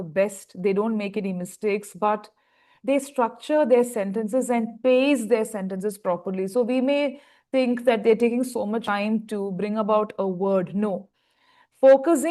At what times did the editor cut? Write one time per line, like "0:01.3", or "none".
none